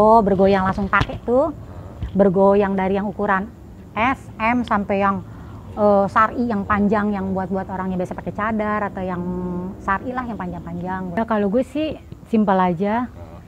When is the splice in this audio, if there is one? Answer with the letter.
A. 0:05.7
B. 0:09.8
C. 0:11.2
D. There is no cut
C